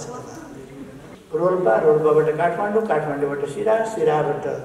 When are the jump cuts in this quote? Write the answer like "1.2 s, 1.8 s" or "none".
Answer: 1.1 s